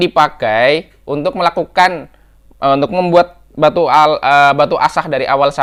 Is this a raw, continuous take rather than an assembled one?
yes; 0 cuts

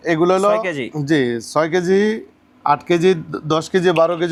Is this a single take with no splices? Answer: yes; 0 cuts

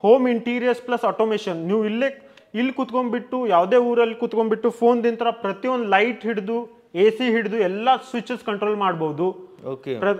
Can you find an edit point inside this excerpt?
no; 0 cuts

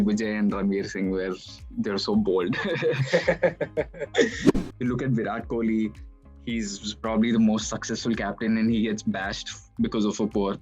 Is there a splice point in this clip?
yes; 1 cut; at 4.5 s

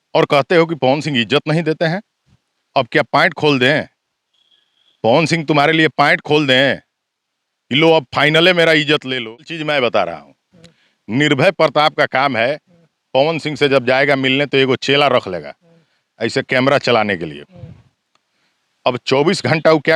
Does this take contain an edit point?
yes; 1 cut; at 9.5 s

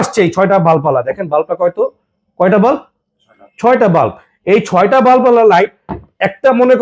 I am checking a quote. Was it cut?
no; 0 cuts

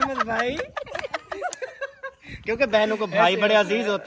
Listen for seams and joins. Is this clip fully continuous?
yes; 0 cuts

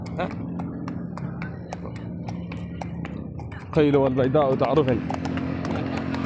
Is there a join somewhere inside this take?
yes; 1 cut; at 1.1 s

